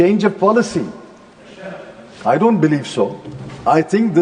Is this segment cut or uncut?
uncut